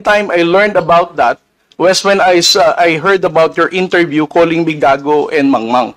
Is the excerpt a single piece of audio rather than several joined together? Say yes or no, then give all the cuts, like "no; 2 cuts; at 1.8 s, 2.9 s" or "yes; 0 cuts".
yes; 0 cuts